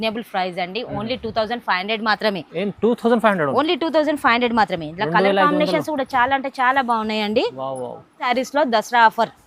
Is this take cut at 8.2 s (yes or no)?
yes